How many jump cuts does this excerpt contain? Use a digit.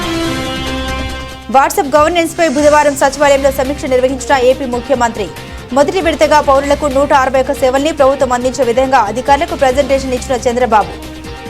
1